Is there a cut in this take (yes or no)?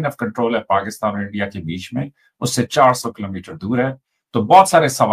no